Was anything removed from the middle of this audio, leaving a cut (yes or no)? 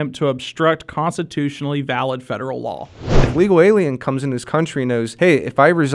yes